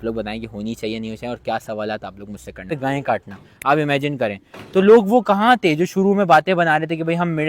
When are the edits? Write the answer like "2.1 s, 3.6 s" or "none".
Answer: 2.7 s